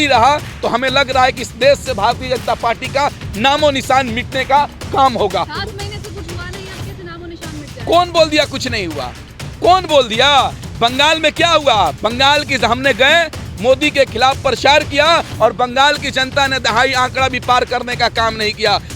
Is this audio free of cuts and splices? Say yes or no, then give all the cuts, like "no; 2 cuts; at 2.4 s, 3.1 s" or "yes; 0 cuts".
yes; 0 cuts